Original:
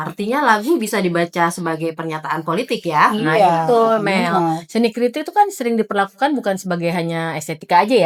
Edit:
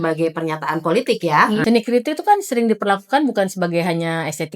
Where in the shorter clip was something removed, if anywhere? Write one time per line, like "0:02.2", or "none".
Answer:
0:01.6